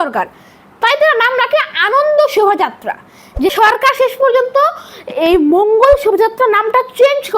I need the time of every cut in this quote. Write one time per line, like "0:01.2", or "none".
0:03.5